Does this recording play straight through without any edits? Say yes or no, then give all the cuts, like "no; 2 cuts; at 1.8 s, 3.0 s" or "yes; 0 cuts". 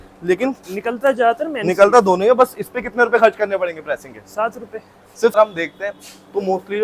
no; 1 cut; at 5.4 s